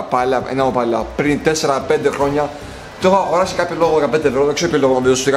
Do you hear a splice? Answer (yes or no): no